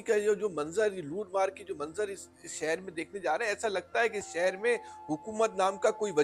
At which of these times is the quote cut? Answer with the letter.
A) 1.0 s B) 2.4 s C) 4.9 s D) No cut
D